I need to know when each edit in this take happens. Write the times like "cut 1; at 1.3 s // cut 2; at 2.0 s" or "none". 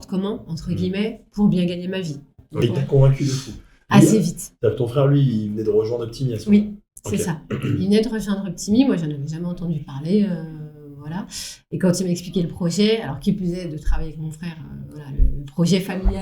cut 1; at 2.5 s